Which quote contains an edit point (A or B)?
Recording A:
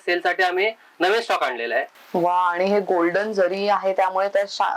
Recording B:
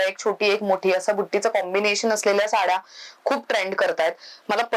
A